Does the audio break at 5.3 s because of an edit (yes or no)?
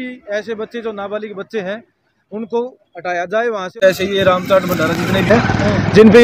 no